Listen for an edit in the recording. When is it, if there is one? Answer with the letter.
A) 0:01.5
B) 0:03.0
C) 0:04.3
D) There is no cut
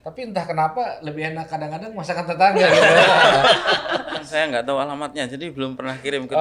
C